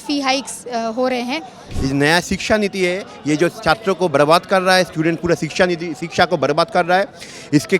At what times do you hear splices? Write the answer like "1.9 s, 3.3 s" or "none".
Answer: 1.7 s